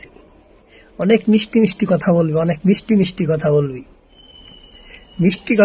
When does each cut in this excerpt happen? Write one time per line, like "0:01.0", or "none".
none